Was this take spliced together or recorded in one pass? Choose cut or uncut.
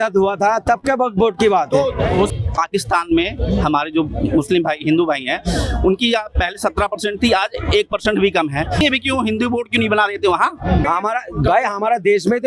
cut